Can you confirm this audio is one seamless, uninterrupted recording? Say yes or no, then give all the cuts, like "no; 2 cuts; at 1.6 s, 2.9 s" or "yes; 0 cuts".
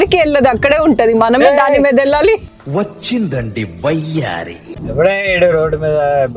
no; 1 cut; at 4.7 s